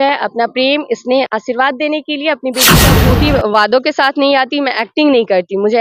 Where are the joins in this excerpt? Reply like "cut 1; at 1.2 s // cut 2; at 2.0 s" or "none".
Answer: cut 1; at 3.0 s